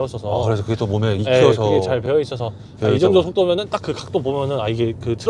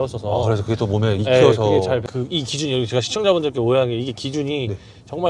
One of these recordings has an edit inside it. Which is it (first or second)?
second